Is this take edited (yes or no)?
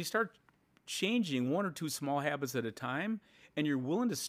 no